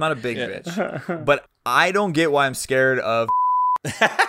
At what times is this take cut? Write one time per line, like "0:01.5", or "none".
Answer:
0:01.3
0:03.3